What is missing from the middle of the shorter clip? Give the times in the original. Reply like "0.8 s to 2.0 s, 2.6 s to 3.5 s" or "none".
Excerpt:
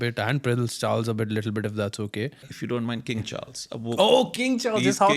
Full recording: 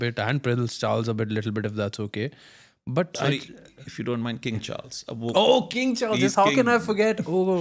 2.5 s to 3.8 s